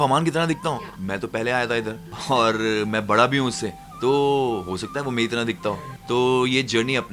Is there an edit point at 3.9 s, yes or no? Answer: no